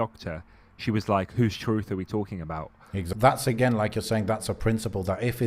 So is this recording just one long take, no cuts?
no; 1 cut; at 3.1 s

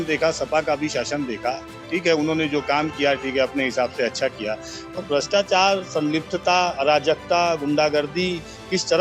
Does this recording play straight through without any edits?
yes; 0 cuts

